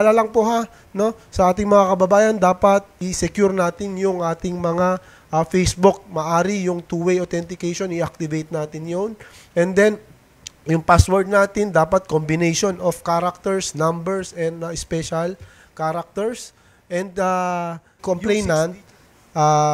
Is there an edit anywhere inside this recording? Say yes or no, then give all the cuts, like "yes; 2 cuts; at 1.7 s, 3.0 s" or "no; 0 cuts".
yes; 1 cut; at 18.0 s